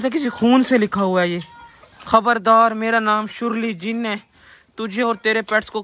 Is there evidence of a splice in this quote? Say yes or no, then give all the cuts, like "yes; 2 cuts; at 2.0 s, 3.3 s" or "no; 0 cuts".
no; 0 cuts